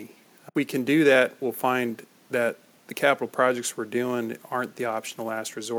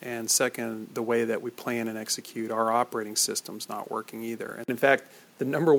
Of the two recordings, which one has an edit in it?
second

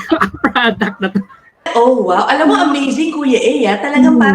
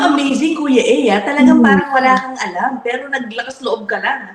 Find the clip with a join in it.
first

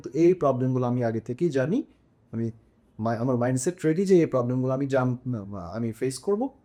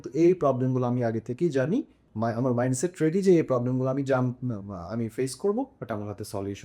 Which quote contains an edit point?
second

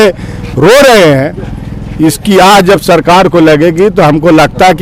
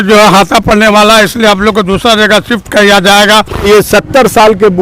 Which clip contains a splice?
second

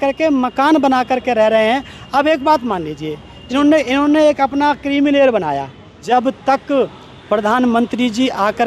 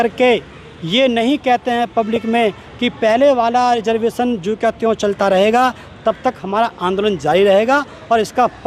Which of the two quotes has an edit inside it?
first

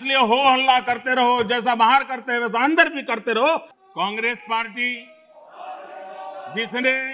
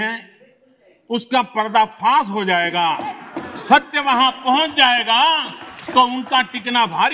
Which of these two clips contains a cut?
first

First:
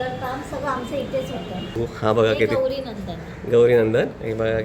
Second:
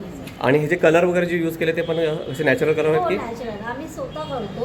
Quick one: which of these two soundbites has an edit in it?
first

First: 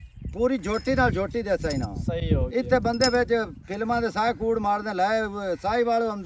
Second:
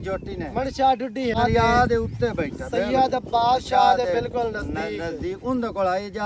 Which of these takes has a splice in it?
second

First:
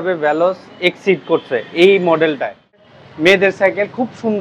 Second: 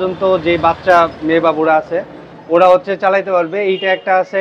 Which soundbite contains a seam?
first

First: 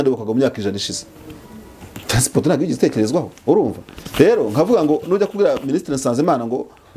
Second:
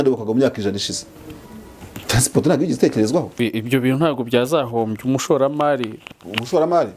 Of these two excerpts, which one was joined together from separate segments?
second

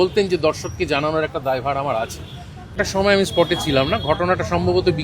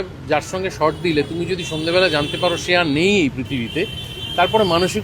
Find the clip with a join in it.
first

